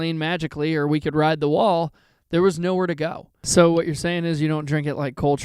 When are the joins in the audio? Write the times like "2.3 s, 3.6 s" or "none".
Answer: 3.4 s